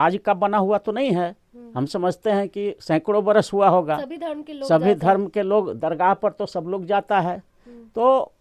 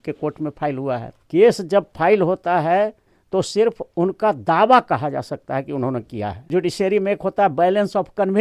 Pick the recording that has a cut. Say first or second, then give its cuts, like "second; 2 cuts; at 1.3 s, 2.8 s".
second; 2 cuts; at 1.1 s, 6.4 s